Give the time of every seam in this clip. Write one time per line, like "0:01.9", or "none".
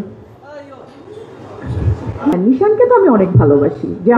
0:02.3

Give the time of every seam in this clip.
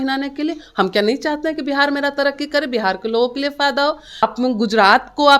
0:04.2

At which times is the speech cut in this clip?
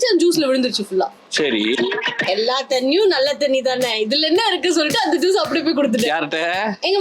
0:01.9

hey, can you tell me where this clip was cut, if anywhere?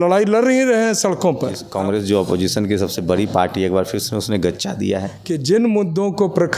0:01.6
0:05.1

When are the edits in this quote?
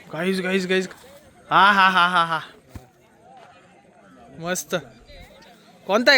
0:00.9

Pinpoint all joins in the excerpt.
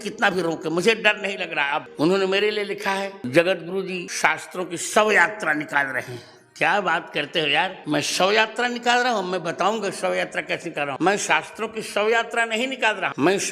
0:01.9

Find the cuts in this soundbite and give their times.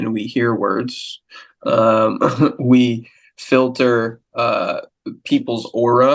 none

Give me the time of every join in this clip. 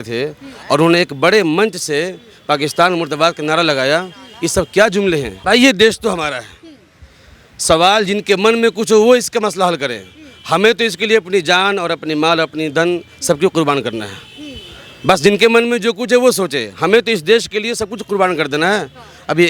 0:05.4

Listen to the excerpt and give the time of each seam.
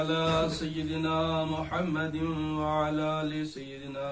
none

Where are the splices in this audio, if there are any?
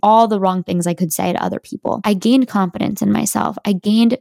0:02.0

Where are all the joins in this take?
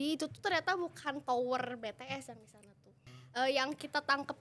0:03.1

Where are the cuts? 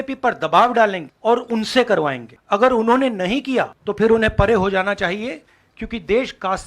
0:01.1
0:02.3
0:03.8

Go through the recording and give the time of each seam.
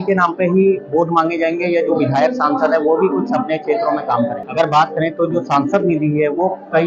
0:04.4

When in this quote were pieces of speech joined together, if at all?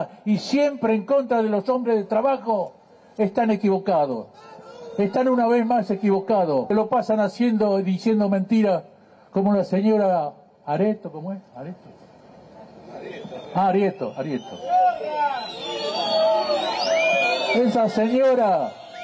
0:06.7

